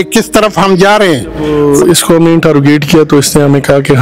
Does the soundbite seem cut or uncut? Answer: cut